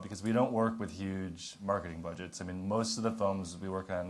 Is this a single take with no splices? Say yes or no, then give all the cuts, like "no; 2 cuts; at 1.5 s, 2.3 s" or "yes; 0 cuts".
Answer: yes; 0 cuts